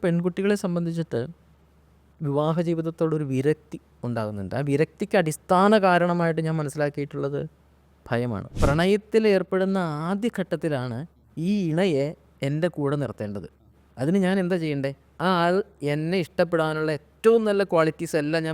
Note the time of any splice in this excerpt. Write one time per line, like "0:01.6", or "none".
0:08.5